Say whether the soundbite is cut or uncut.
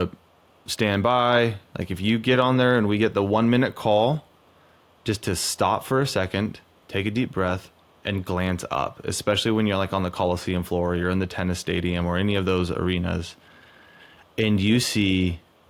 uncut